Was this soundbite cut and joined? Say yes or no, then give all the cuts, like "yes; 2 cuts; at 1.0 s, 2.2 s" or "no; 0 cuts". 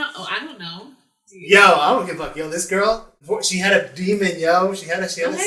yes; 1 cut; at 3.1 s